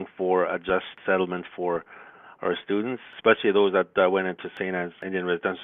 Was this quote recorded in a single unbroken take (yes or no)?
no